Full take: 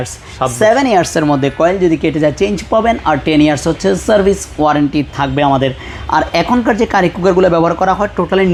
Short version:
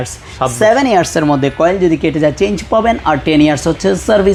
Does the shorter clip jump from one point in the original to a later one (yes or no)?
no